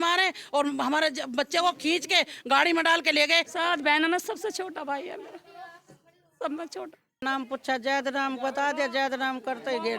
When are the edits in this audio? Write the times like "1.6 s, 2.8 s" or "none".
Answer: 3.5 s, 7.2 s